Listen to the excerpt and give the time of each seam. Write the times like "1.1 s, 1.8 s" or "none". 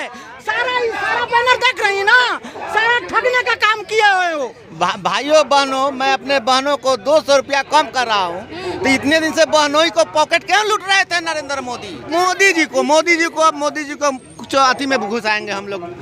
4.6 s, 11.9 s